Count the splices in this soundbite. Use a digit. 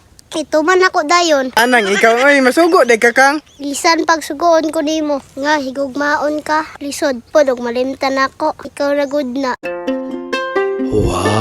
1